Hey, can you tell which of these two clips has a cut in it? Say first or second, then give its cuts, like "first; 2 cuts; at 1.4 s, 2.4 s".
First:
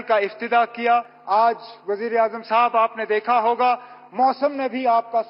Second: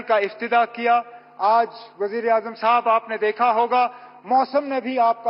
first; 1 cut; at 1.1 s